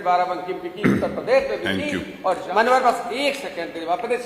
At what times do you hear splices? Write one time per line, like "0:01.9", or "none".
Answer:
0:02.4